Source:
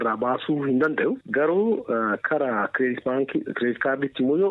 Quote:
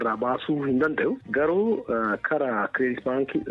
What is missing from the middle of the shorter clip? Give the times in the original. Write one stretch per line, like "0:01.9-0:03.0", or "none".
none

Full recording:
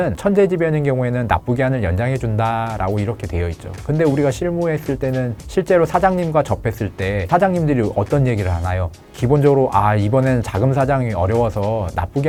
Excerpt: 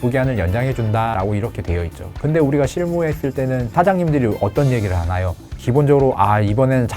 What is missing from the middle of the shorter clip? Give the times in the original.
0:02.6-0:02.8
0:05.3-0:07.2

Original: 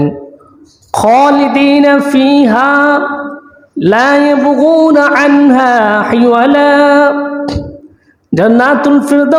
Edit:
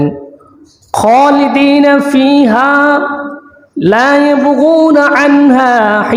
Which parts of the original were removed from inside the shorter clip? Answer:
none

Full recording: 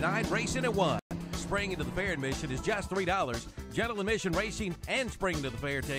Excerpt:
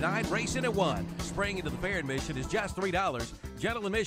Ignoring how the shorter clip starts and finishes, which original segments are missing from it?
0:01.0-0:01.1

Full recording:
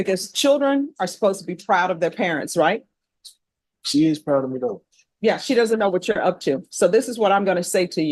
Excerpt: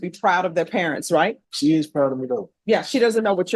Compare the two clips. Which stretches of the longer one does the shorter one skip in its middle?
0:02.9-0:03.8
0:04.8-0:05.1

